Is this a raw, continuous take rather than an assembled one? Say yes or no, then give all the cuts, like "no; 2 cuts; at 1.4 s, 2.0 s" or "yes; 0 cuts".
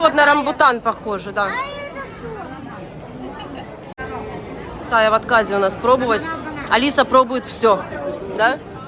yes; 0 cuts